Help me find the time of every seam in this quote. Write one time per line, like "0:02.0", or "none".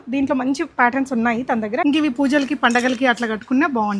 0:01.8